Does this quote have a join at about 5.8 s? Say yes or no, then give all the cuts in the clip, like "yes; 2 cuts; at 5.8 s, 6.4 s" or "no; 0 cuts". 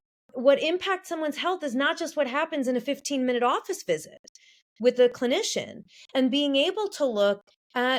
no; 0 cuts